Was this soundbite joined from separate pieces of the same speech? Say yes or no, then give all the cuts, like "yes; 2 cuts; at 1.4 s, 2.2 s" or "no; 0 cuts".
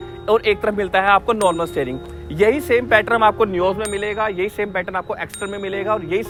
no; 0 cuts